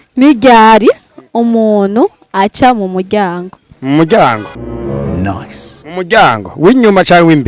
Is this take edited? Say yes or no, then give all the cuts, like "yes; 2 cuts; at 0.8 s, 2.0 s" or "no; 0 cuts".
yes; 2 cuts; at 4.5 s, 5.9 s